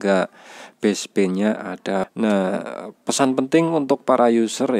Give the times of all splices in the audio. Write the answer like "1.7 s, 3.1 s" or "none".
2.1 s